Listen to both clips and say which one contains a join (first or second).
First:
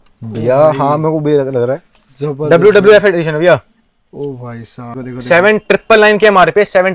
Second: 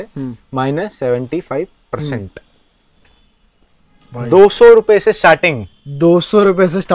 first